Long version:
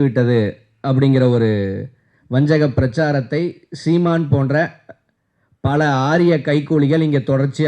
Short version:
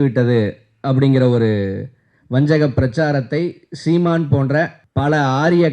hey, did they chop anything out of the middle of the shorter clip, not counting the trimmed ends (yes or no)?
yes